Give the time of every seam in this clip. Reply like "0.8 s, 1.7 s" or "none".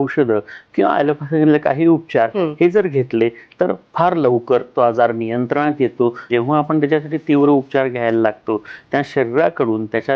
6.3 s